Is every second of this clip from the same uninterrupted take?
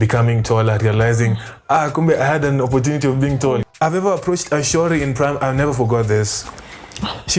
no; 1 cut; at 3.6 s

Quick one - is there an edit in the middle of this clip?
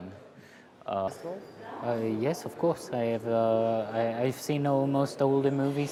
no; 0 cuts

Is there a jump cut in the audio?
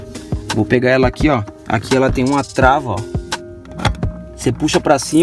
no; 0 cuts

